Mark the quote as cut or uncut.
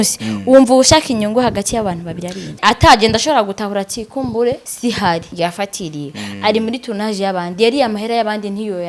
cut